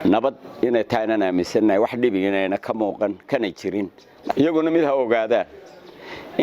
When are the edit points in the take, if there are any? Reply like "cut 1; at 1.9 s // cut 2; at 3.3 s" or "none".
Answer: cut 1; at 4.3 s